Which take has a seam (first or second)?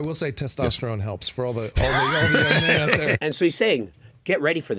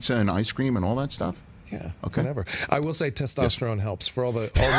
first